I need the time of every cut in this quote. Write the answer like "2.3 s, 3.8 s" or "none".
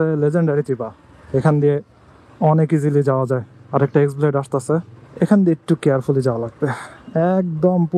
5.0 s